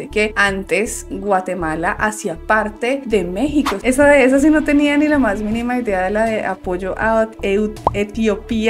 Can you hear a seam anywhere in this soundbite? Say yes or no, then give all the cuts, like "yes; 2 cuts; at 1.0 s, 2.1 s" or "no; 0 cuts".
yes; 1 cut; at 3.8 s